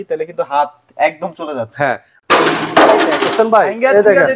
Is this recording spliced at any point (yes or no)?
yes